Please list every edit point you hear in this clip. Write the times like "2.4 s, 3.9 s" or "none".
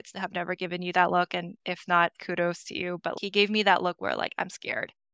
3.1 s